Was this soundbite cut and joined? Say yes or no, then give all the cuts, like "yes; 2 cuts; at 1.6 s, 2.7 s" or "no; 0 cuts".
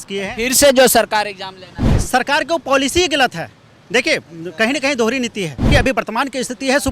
yes; 1 cut; at 5.7 s